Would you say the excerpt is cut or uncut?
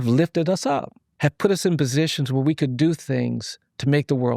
cut